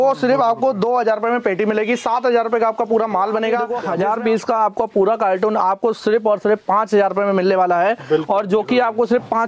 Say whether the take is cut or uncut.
cut